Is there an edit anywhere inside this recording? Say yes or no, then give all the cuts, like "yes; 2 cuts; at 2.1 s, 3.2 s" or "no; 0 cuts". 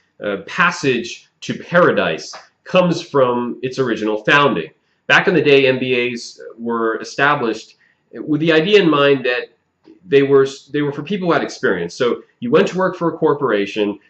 yes; 1 cut; at 7.0 s